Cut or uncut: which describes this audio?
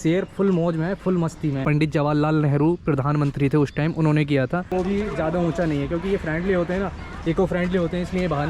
cut